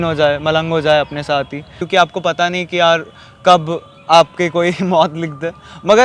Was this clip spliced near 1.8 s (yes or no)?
yes